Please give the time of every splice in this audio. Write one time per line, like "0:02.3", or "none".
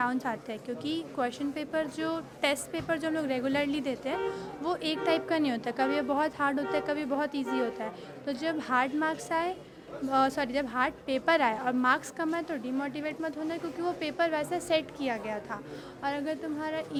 none